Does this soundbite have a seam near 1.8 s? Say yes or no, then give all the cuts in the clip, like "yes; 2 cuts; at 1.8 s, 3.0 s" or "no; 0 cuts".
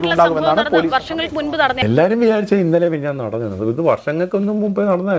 yes; 1 cut; at 1.8 s